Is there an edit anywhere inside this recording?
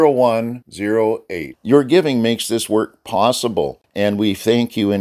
yes; 1 cut; at 3.8 s

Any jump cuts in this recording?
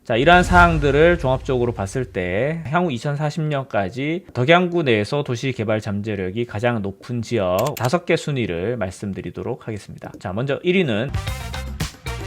yes; 1 cut; at 11.1 s

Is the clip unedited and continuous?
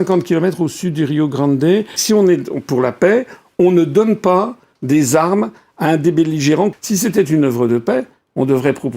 no; 2 cuts; at 2.0 s, 6.7 s

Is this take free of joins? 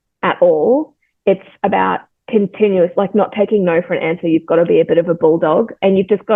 yes; 0 cuts

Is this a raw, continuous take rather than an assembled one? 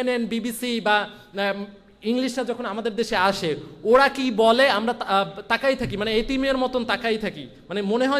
yes; 0 cuts

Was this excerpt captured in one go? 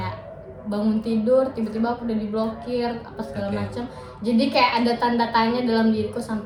yes; 0 cuts

